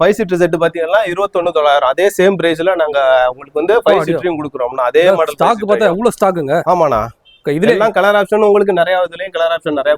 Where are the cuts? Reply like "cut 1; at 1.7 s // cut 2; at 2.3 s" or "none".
none